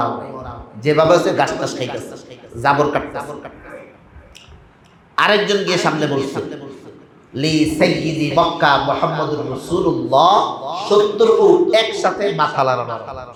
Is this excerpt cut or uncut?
uncut